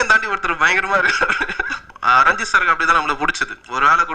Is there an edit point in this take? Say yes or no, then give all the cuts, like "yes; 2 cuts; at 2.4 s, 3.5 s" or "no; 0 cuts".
yes; 1 cut; at 1.9 s